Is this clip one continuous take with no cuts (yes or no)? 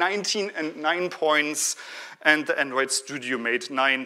yes